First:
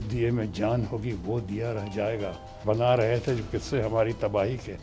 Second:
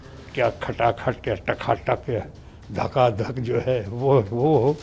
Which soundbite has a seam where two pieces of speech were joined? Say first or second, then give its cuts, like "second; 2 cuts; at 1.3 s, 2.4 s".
first; 1 cut; at 2.6 s